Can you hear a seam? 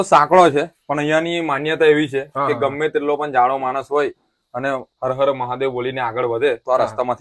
no; 0 cuts

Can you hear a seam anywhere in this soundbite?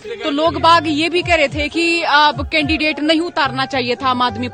no; 0 cuts

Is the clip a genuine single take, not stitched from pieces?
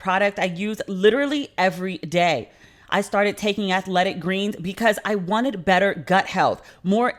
yes; 0 cuts

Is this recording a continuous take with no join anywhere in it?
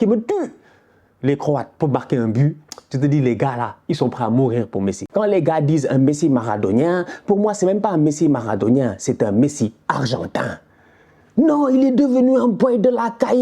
no; 1 cut; at 5.0 s

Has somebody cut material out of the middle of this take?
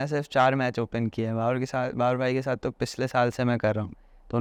no; 0 cuts

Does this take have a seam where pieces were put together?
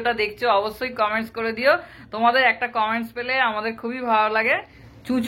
no; 0 cuts

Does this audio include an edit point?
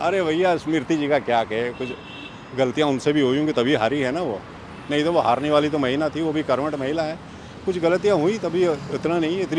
no; 0 cuts

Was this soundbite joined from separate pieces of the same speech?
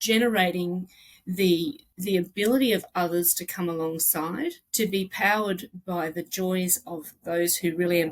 yes; 2 cuts; at 1.9 s, 4.6 s

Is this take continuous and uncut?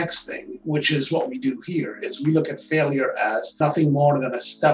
yes; 0 cuts

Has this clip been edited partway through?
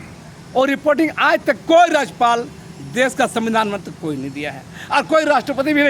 no; 0 cuts

